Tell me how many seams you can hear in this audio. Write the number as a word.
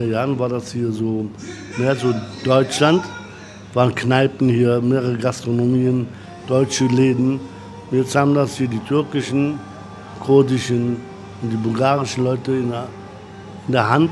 zero